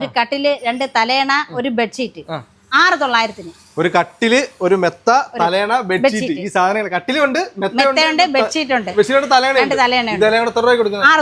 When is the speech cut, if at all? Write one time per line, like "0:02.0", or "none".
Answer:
none